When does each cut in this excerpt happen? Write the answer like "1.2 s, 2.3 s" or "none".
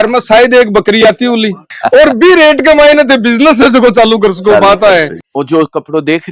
1.8 s, 5.2 s

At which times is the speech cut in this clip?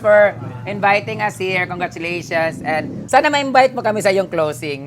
3.0 s

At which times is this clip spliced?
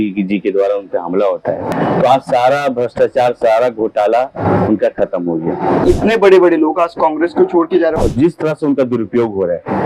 1.7 s, 5.8 s, 8.0 s

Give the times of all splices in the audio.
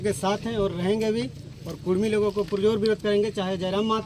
none

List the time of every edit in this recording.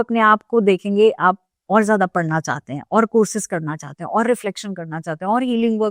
none

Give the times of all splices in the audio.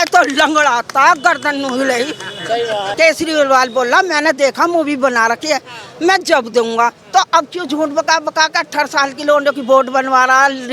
2.9 s

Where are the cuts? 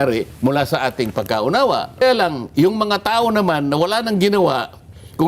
2.0 s

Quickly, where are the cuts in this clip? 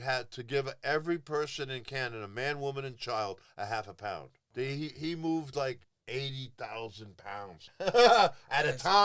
4.3 s, 5.9 s, 7.6 s

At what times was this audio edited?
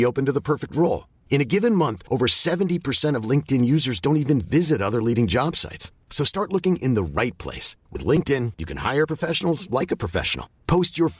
none

